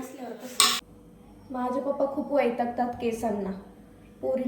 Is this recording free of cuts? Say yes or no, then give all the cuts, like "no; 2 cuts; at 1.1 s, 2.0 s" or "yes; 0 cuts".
no; 1 cut; at 0.9 s